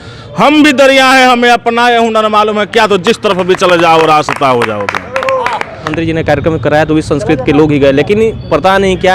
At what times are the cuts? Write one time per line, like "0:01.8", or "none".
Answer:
0:05.9